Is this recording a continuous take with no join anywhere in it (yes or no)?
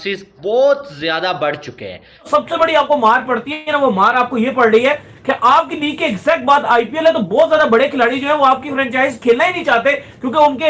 no